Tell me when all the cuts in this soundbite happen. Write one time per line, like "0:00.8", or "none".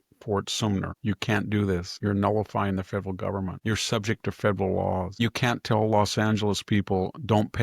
0:00.9
0:01.9
0:03.6
0:05.1